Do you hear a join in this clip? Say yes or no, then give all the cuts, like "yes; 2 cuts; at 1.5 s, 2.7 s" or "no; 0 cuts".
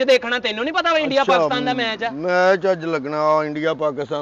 no; 0 cuts